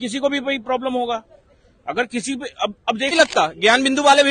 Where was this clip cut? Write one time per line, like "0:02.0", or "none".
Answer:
0:03.1

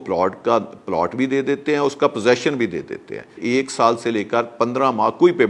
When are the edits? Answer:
0:03.4

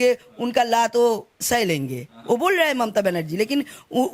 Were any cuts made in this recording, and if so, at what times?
none

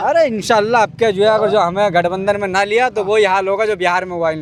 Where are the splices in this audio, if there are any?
none

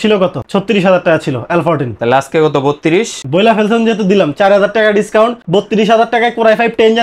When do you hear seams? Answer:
none

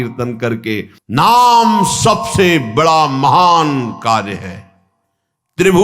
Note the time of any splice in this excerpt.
0:01.0

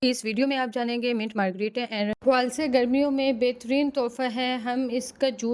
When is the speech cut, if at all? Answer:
0:02.1

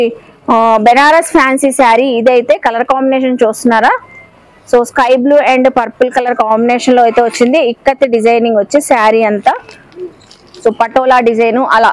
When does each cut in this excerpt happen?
none

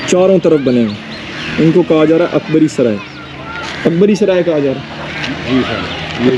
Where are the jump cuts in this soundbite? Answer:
none

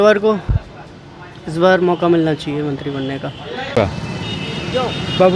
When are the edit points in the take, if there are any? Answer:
0:03.7

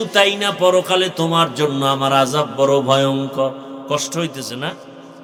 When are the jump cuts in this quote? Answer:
none

